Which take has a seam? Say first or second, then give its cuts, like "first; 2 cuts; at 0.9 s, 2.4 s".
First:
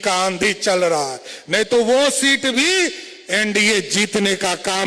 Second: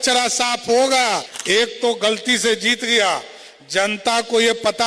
second; 1 cut; at 1.3 s